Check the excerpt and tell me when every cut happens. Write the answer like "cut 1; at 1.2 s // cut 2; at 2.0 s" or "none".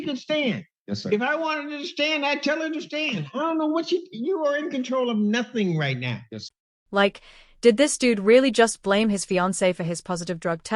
none